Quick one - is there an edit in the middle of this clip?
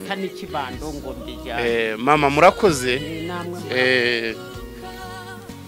yes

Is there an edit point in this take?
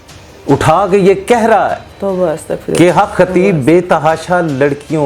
no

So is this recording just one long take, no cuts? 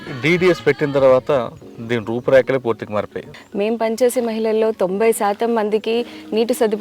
no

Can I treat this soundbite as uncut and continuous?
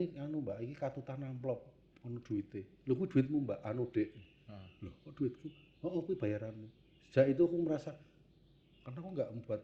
yes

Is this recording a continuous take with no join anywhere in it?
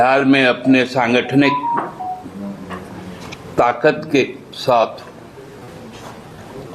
yes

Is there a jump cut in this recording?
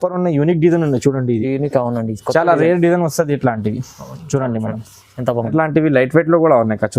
yes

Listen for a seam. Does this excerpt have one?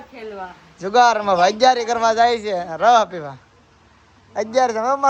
no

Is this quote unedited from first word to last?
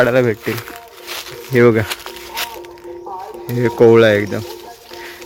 yes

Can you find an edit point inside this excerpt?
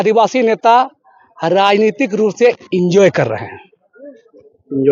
no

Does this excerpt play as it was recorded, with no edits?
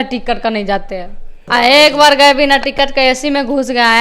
no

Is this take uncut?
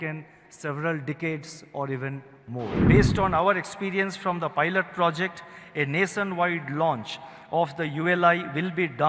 no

